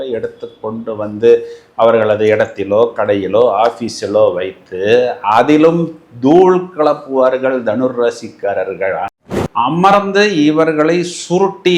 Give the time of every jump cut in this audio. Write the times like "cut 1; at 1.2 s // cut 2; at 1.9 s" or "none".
cut 1; at 9.1 s